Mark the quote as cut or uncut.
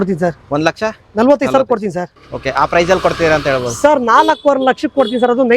cut